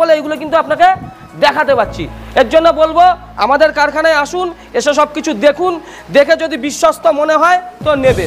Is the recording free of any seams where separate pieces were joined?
yes; 0 cuts

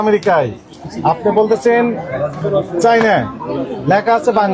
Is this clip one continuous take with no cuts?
yes; 0 cuts

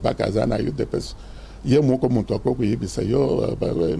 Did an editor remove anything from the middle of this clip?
no; 0 cuts

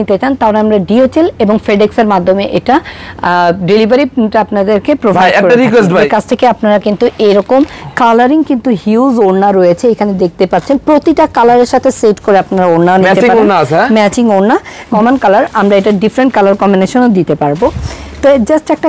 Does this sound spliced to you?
yes; 2 cuts; at 6.0 s, 14.9 s

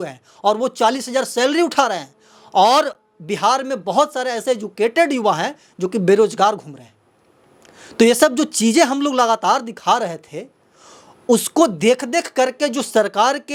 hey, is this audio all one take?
yes; 0 cuts

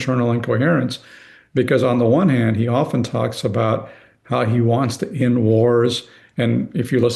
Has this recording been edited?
no; 0 cuts

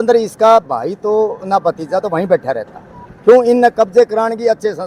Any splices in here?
no; 0 cuts

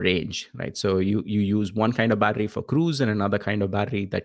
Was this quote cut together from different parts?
no; 0 cuts

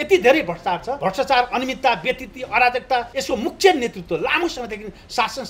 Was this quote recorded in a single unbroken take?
no; 2 cuts; at 0.9 s, 3.1 s

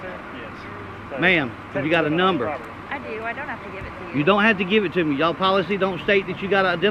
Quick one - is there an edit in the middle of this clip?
no; 0 cuts

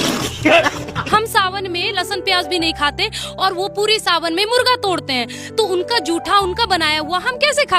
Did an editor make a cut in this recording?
yes; 1 cut; at 1.1 s

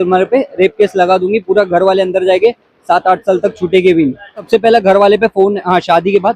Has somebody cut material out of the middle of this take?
yes; 1 cut; at 4.5 s

